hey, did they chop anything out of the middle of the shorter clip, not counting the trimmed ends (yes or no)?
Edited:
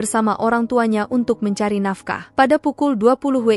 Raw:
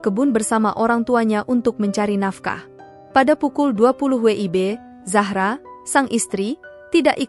yes